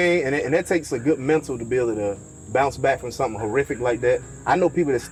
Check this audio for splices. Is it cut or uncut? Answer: uncut